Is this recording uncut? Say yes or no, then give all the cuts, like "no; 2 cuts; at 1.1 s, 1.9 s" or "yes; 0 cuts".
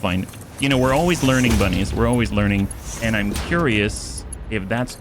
no; 1 cut; at 2.8 s